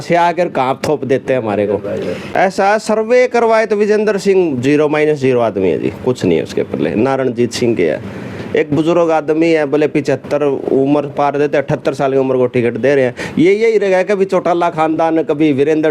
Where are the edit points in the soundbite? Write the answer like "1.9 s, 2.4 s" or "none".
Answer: 2.2 s